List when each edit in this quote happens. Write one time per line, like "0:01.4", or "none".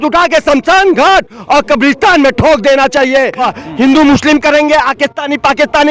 0:03.5

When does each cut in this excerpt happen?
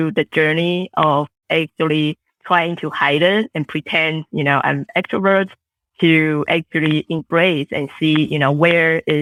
none

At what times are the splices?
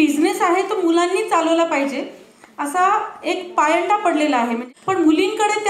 0:04.6

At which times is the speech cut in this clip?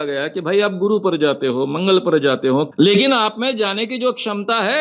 none

